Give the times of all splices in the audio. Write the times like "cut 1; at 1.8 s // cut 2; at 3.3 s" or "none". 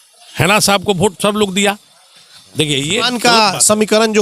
cut 1; at 3.0 s